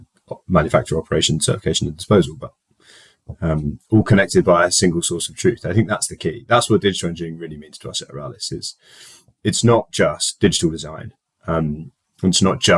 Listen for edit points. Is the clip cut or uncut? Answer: uncut